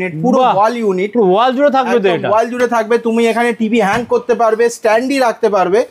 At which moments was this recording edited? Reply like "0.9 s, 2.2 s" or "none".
none